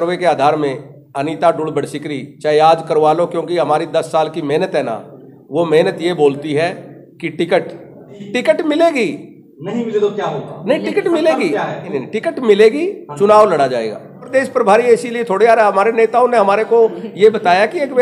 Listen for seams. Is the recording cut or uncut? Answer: cut